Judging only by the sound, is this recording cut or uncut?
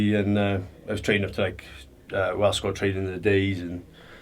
uncut